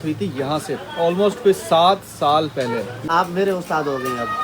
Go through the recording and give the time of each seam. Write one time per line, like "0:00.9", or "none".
0:03.0